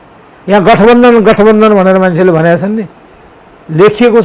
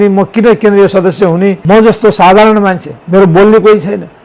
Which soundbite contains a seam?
second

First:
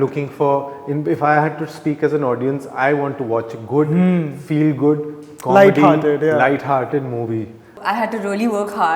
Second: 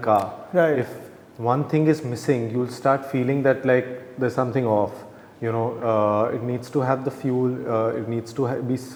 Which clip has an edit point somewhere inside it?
first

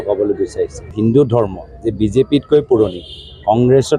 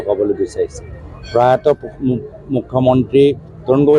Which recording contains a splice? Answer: first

